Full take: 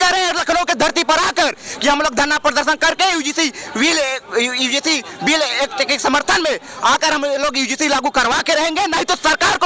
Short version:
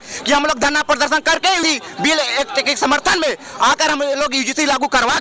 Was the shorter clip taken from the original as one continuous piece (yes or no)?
no